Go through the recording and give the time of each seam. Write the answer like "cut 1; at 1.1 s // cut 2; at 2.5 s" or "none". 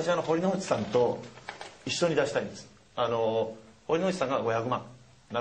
none

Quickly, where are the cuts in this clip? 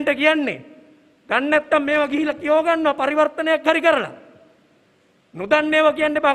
none

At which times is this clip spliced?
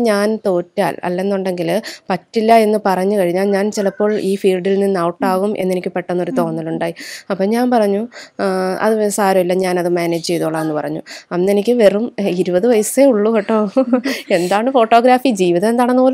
none

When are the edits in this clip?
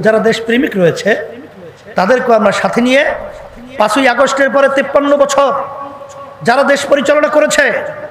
none

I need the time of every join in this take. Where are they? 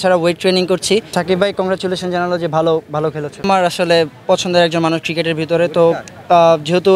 cut 1; at 1.1 s // cut 2; at 3.3 s

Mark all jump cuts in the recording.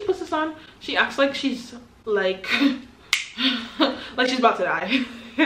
none

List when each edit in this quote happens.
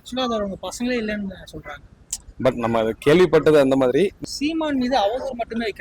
cut 1; at 4.2 s

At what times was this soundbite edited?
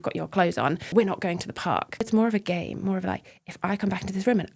cut 1; at 0.9 s // cut 2; at 2.0 s

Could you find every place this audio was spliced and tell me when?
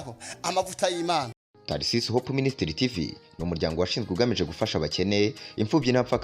cut 1; at 1.3 s

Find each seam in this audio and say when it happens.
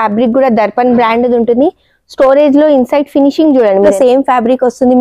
cut 1; at 3.9 s

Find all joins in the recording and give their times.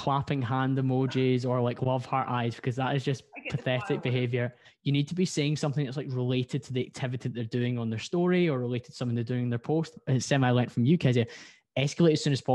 cut 1; at 4.7 s // cut 2; at 10.0 s

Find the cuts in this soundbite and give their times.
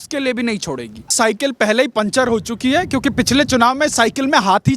cut 1; at 1.1 s

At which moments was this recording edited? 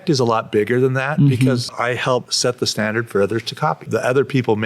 cut 1; at 2.0 s // cut 2; at 3.8 s

